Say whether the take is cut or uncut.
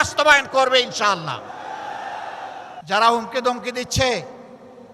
cut